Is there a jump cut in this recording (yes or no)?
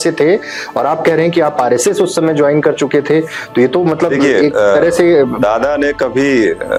no